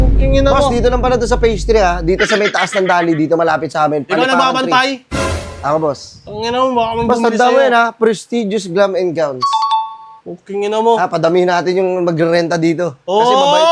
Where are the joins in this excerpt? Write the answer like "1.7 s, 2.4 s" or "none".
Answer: none